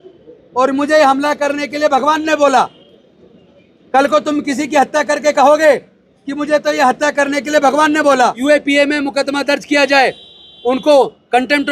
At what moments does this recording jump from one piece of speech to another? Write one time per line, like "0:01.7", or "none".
0:08.4